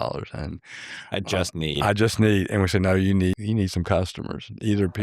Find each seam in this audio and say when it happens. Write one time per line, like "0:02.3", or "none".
0:03.3